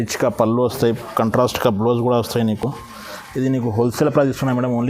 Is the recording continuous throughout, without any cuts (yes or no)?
yes